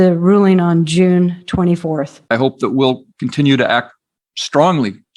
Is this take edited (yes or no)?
yes